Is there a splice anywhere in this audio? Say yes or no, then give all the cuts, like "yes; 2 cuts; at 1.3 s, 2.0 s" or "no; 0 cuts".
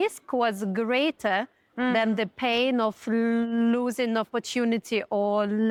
no; 0 cuts